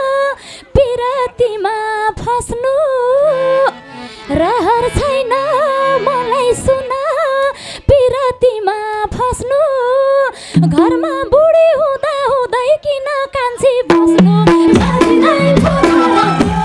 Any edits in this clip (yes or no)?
no